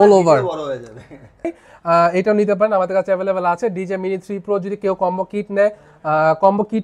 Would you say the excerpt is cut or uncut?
cut